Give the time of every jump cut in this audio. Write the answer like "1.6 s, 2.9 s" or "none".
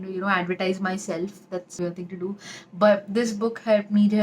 1.7 s